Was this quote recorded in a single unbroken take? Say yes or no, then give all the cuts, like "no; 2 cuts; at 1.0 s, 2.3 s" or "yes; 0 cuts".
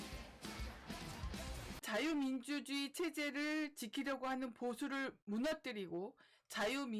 no; 1 cut; at 1.8 s